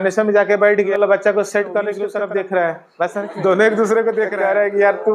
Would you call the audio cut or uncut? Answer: cut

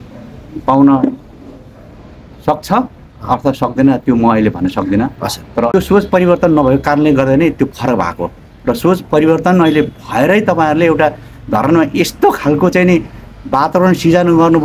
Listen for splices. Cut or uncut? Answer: cut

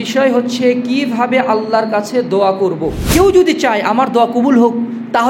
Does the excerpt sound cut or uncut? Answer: cut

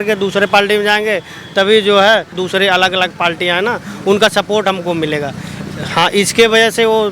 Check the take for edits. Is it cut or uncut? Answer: uncut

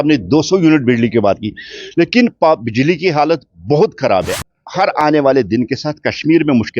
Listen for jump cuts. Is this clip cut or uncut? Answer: cut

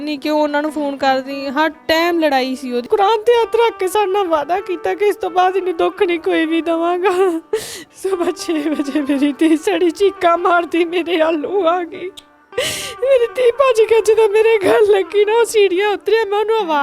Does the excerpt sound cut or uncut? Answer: cut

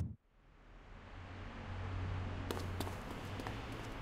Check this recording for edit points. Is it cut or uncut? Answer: uncut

